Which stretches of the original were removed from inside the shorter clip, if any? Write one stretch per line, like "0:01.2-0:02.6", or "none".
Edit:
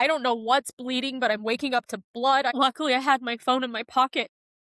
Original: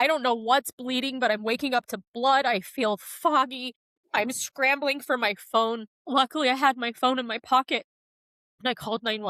0:02.5-0:06.1